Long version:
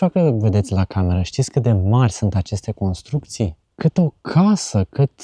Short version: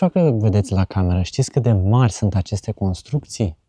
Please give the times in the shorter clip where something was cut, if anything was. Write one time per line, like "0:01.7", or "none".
none